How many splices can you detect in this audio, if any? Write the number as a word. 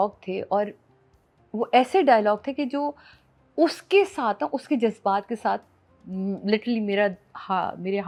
zero